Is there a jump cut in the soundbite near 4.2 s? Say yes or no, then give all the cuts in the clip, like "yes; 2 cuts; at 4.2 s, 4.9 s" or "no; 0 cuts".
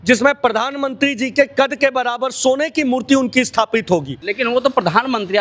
yes; 1 cut; at 4.2 s